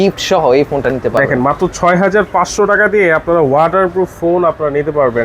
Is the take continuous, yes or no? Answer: yes